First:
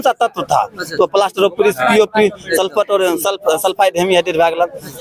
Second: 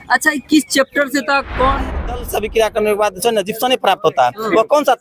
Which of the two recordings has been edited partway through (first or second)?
second